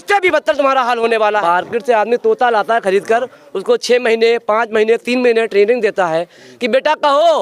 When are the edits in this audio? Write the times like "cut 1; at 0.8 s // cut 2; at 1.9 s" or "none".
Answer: cut 1; at 1.4 s